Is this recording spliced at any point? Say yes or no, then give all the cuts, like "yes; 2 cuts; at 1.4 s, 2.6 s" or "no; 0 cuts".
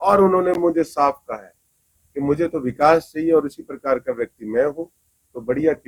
no; 0 cuts